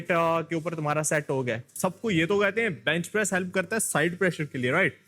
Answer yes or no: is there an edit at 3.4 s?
no